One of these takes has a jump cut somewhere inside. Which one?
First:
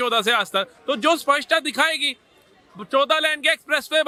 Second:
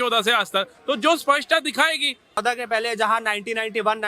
second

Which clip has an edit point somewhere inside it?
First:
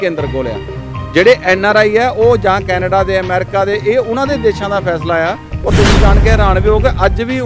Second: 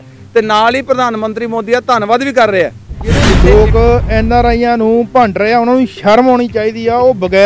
second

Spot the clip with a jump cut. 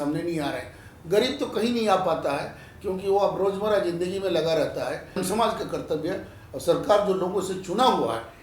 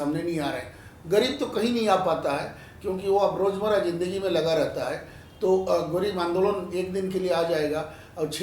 first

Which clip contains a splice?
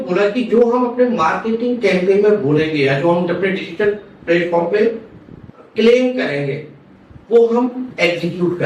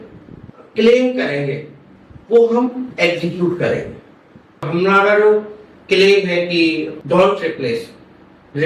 second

